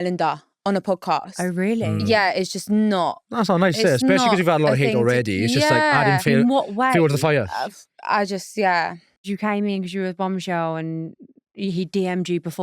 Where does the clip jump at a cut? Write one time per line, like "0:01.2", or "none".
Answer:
none